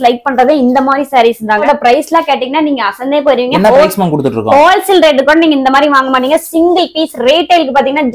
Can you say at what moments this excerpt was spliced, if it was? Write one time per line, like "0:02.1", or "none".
0:01.6